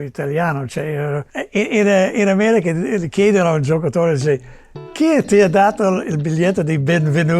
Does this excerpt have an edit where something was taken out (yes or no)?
yes